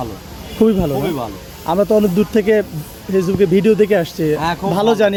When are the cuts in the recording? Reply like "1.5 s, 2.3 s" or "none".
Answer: none